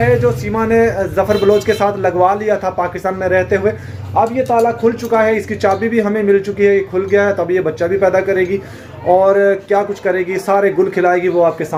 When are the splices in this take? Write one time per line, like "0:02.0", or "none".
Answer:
none

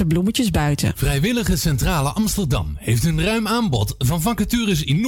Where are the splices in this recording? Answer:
0:01.0

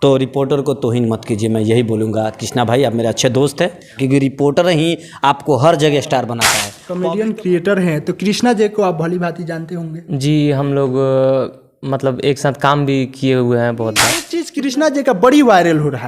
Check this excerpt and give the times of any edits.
0:04.0
0:06.4
0:14.4

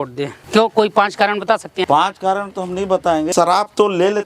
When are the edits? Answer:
0:01.9
0:03.3

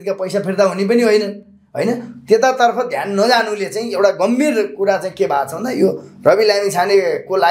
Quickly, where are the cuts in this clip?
none

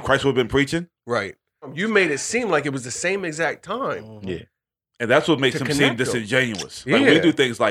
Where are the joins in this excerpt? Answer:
0:01.8

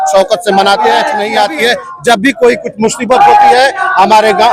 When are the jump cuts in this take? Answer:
0:01.2

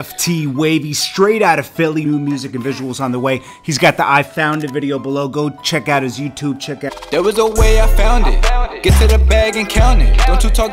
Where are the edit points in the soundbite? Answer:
0:02.0
0:06.9

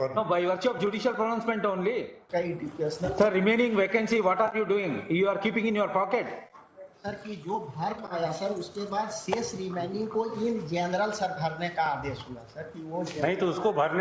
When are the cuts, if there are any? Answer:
0:02.2

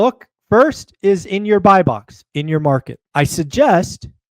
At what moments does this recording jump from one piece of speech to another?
0:03.0

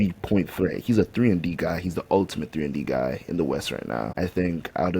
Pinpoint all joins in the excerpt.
0:04.1

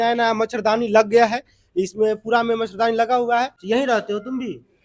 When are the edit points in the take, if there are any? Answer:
0:03.6

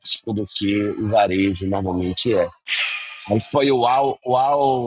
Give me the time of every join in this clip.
0:02.7

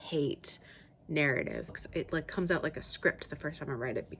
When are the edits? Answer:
0:01.8

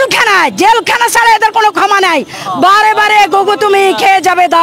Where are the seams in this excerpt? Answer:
none

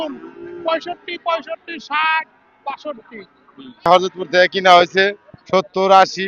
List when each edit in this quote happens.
0:03.9

